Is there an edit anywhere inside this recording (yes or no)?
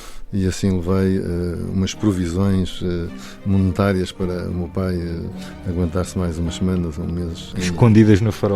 yes